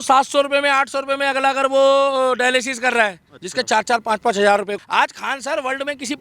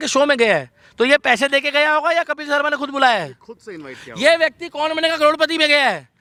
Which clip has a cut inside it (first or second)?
first